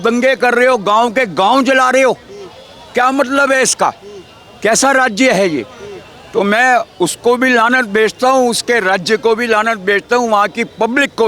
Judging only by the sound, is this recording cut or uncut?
uncut